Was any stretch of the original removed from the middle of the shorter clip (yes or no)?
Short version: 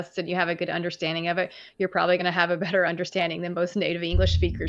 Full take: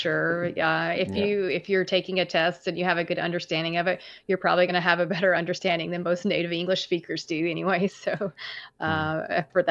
no